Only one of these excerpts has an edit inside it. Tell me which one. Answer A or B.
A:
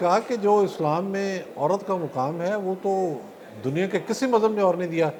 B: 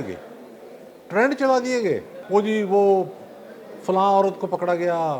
B